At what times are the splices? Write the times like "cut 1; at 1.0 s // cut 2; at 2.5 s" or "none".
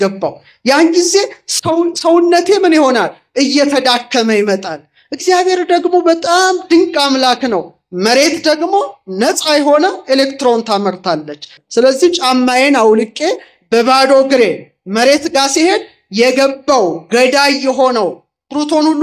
none